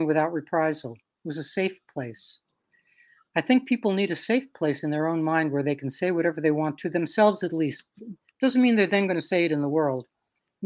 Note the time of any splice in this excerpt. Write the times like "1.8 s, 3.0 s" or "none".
none